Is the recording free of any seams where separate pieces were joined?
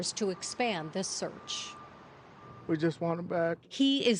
yes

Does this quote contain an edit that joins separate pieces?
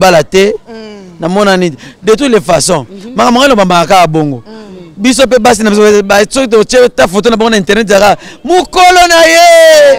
no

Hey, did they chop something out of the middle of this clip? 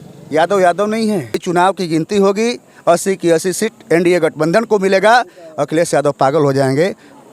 yes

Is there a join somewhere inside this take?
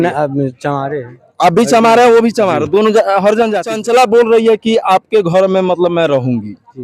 yes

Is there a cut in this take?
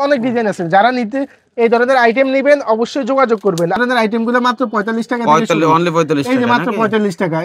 yes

